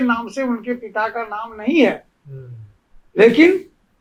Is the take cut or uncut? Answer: uncut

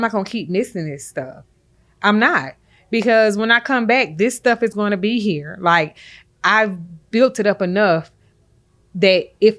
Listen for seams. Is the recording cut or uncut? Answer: uncut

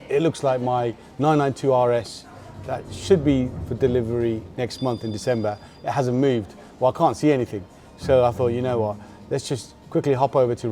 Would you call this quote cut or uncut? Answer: uncut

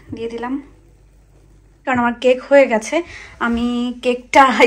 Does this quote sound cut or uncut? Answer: cut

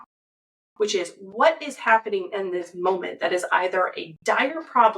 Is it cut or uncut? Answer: uncut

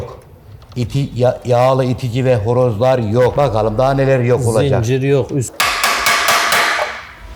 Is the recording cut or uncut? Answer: cut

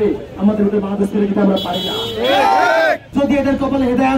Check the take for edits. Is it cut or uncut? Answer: cut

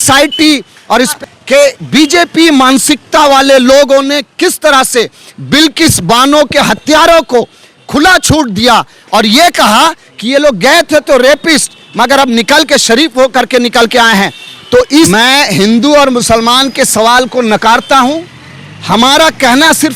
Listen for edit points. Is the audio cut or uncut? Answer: cut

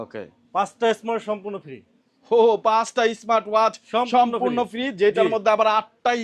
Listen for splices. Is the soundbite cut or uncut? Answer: uncut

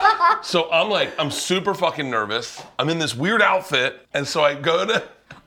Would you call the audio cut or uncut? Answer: cut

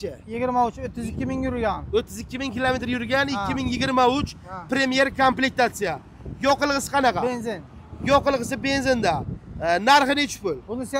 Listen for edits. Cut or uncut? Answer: uncut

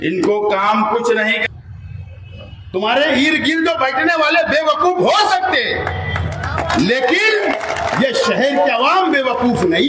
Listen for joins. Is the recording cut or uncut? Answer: cut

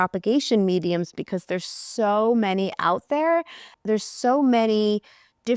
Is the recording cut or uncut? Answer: cut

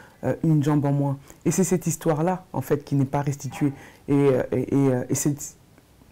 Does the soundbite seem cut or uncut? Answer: uncut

